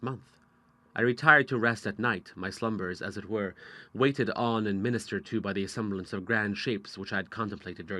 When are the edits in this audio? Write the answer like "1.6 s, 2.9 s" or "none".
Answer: 3.2 s